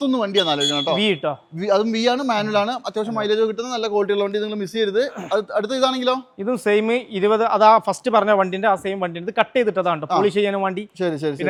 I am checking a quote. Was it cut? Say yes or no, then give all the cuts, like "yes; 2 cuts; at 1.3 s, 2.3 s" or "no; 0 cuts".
no; 0 cuts